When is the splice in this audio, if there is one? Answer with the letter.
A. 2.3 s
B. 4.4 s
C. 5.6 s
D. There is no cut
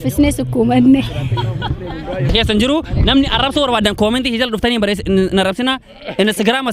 A